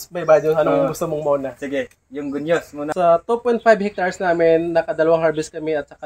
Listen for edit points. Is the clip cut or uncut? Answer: cut